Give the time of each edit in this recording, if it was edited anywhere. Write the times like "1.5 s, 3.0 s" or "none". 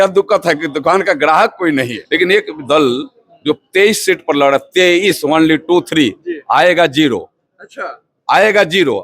2.0 s